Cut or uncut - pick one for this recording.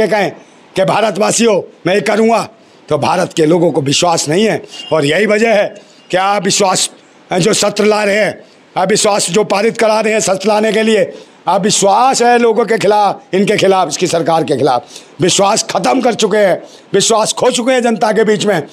uncut